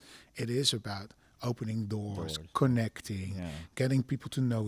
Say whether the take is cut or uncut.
uncut